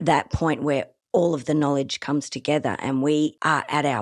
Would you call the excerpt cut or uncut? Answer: uncut